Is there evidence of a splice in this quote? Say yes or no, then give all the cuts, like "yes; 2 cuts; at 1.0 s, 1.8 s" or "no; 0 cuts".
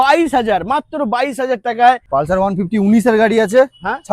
yes; 1 cut; at 2.0 s